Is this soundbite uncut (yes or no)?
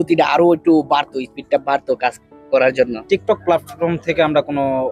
no